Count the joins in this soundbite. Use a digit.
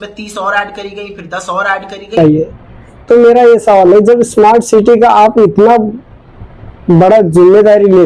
1